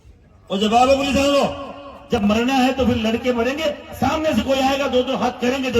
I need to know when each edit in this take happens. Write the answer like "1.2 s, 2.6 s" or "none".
2.2 s